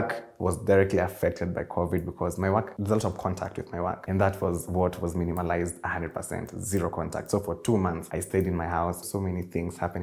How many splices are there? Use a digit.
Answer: 4